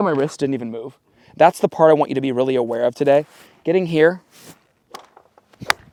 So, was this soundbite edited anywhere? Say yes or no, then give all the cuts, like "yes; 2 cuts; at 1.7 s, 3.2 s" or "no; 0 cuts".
no; 0 cuts